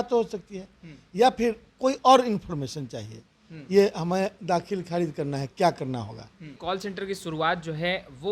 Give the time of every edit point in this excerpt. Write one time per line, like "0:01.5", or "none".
0:06.5